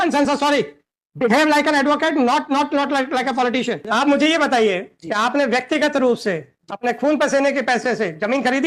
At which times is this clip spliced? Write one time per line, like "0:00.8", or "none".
0:03.8